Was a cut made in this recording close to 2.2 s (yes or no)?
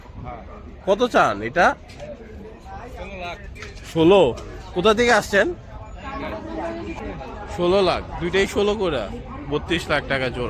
no